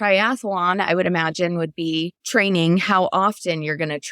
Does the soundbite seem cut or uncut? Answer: cut